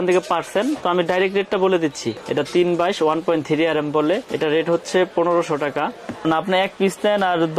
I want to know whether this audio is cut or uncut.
cut